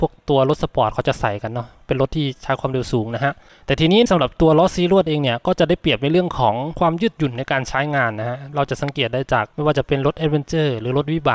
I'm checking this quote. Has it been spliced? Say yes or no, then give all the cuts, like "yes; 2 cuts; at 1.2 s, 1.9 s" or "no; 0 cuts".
no; 0 cuts